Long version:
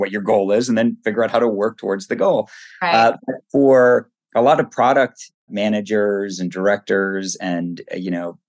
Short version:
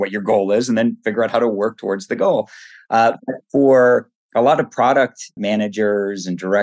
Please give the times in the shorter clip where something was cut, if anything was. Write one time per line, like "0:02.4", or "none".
0:05.3